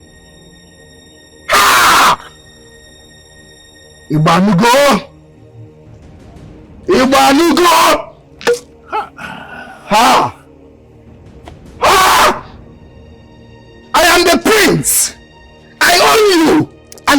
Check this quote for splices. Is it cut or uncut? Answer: cut